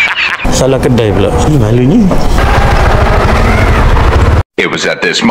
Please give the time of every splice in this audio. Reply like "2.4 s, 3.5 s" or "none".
2.4 s